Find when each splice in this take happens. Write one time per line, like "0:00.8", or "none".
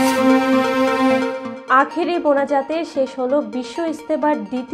0:01.5